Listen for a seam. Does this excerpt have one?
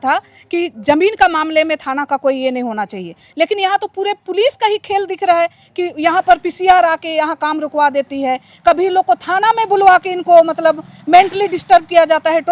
no; 0 cuts

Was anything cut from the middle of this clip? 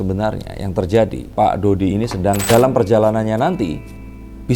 yes; 2 cuts; at 1.3 s, 2.4 s

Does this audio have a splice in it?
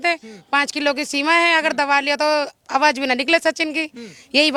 no; 0 cuts

